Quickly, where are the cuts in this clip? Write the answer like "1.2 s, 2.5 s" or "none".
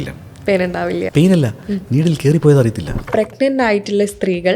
1.0 s, 3.1 s